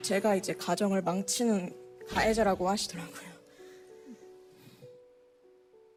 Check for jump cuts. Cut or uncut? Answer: uncut